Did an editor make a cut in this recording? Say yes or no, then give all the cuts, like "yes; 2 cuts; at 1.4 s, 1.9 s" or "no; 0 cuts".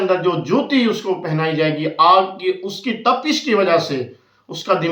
no; 0 cuts